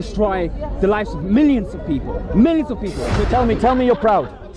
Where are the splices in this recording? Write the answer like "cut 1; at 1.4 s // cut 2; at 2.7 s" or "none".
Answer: cut 1; at 3.2 s